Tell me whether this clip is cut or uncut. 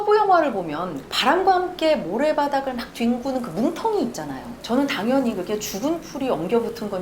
cut